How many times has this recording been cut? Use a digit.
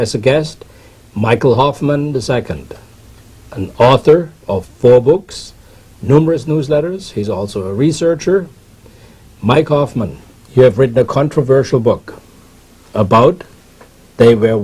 1